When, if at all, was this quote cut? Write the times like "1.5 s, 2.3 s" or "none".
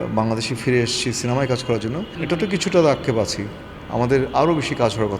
2.1 s